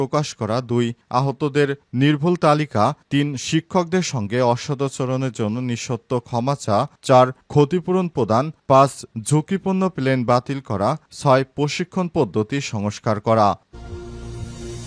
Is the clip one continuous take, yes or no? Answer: no